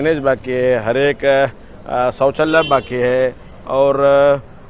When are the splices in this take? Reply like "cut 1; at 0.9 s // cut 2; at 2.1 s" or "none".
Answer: none